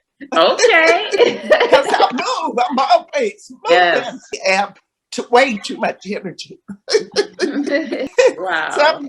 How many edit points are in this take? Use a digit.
2